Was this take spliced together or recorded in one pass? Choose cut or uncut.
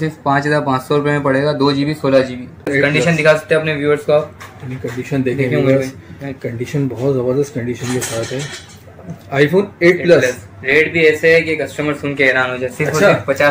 cut